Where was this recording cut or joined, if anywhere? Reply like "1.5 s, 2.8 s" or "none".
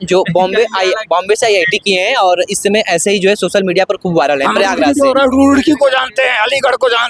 none